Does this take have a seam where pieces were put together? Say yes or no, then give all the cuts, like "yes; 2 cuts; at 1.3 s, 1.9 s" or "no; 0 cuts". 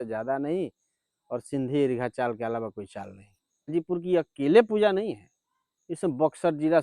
yes; 1 cut; at 3.7 s